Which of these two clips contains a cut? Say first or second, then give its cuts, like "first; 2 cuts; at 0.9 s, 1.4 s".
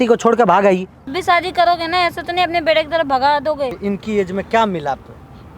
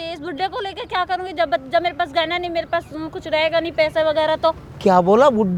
first; 2 cuts; at 1.1 s, 3.8 s